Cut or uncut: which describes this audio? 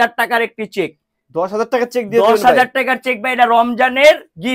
uncut